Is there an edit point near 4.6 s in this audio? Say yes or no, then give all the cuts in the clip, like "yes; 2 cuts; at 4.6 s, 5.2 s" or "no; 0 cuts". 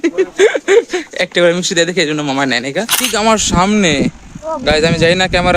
no; 1 cut; at 3.1 s